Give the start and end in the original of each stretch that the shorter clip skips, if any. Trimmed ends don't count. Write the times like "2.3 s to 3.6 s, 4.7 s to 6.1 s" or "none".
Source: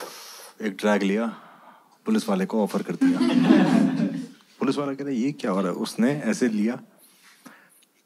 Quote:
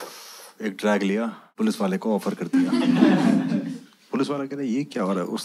1.4 s to 1.9 s